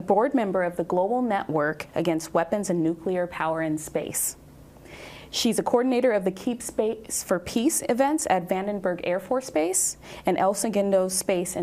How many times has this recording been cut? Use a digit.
1